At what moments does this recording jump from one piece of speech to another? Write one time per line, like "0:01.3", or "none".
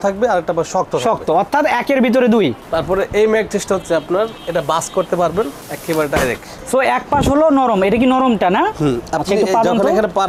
none